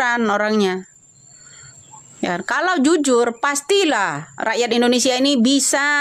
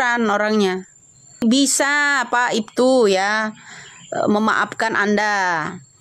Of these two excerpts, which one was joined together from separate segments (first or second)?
second